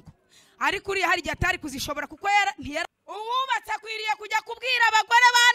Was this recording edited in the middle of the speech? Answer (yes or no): yes